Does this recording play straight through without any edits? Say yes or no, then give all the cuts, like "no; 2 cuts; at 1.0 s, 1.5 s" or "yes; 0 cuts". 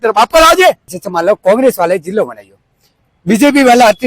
no; 1 cut; at 0.9 s